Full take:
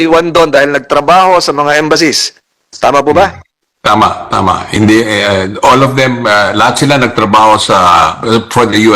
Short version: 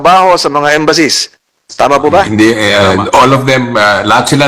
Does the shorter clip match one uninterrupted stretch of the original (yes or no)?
no